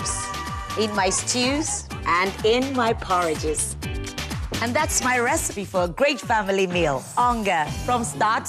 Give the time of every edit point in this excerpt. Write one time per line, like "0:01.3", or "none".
none